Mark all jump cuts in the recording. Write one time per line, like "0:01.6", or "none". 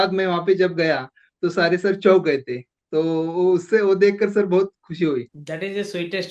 0:05.4